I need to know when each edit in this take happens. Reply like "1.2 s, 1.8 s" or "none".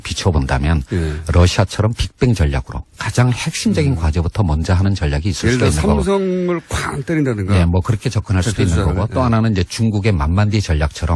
none

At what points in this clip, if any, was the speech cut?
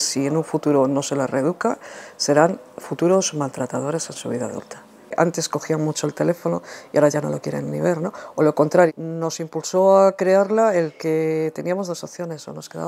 5.1 s, 8.9 s

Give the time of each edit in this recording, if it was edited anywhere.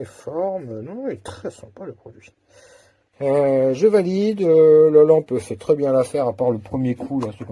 3.0 s

